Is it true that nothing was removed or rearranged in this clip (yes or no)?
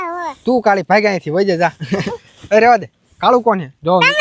yes